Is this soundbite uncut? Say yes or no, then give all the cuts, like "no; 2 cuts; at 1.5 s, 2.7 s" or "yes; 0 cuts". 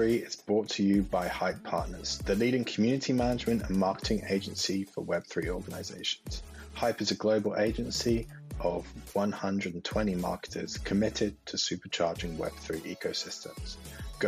yes; 0 cuts